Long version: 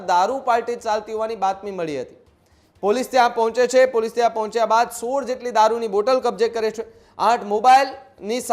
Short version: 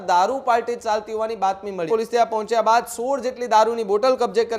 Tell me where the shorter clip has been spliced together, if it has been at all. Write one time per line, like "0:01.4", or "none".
0:01.9